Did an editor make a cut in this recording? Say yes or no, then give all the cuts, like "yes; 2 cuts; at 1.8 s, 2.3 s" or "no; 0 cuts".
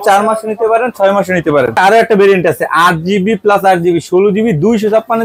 yes; 1 cut; at 1.8 s